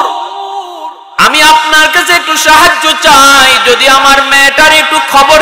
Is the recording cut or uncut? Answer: uncut